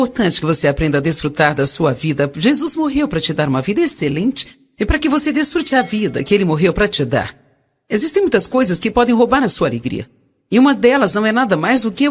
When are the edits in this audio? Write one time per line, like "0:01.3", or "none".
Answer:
none